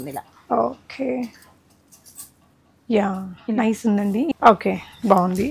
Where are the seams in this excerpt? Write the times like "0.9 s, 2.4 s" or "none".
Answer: 4.3 s